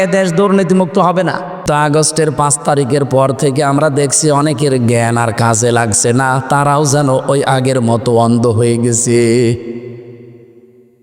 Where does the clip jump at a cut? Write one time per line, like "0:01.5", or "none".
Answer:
0:01.6